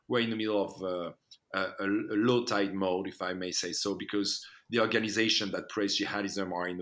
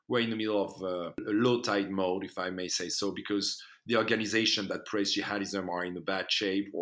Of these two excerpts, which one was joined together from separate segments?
second; 1 cut; at 1.2 s

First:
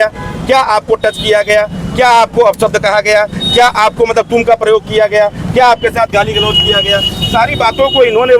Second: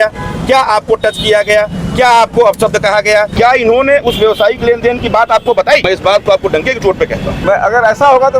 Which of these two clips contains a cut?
second; 3 cuts; at 3.3 s, 5.8 s, 7.4 s

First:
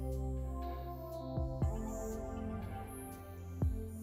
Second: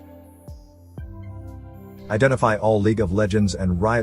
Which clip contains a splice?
second; 1 cut; at 2.1 s

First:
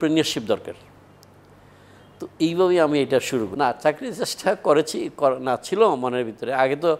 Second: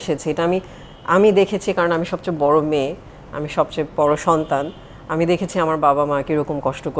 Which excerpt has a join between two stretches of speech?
first; 1 cut; at 3.5 s

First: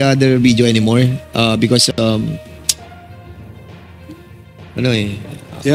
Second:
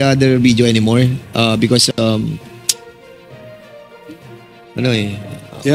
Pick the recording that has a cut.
first; 2 cuts; at 2.5 s, 4.7 s

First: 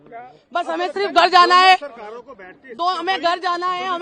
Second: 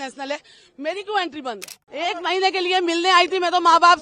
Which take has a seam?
second; 1 cut; at 1.8 s

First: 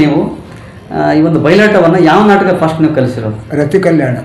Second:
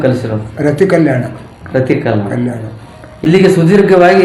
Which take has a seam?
second; 1 cut; at 3.1 s

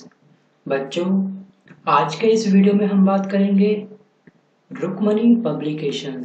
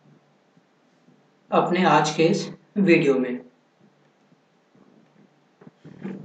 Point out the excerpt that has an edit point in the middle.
second; 1 cut; at 3.5 s

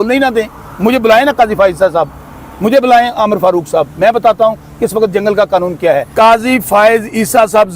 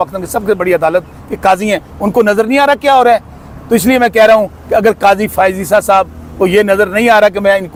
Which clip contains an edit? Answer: first; 1 cut; at 6.1 s

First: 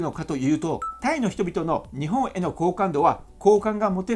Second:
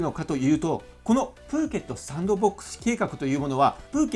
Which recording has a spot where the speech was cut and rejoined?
first; 1 cut; at 0.9 s

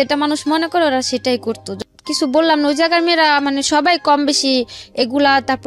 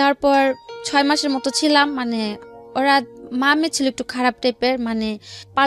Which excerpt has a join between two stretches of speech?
first; 1 cut; at 1.7 s

